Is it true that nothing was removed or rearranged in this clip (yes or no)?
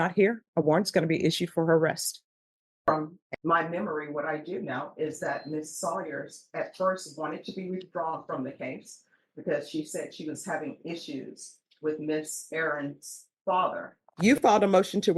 no